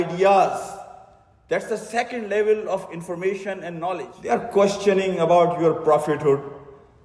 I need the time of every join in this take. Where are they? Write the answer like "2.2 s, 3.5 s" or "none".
4.1 s